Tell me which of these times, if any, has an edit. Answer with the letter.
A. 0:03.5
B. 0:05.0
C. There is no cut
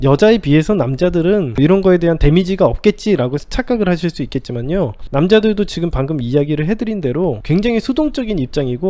B